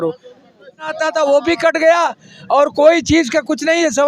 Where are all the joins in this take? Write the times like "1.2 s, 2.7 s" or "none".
0.9 s